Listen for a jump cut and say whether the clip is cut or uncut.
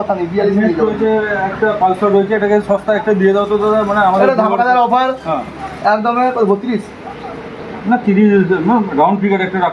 uncut